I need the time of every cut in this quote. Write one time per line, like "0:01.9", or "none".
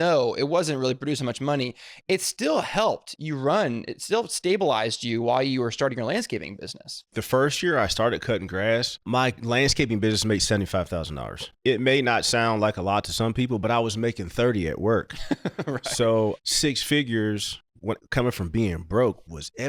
0:07.2
0:09.0
0:11.5
0:16.4